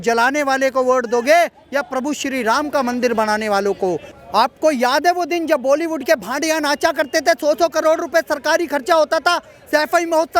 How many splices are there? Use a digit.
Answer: 1